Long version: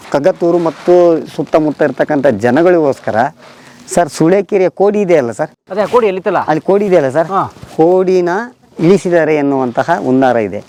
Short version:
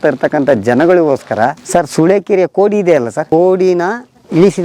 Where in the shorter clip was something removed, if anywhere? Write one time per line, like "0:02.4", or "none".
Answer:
0:01.6
0:03.2